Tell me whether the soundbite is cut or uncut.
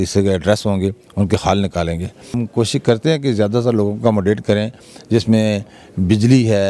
cut